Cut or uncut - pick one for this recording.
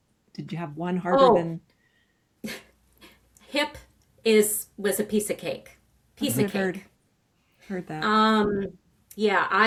uncut